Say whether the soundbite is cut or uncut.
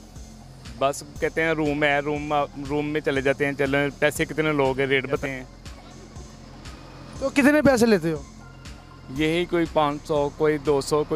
uncut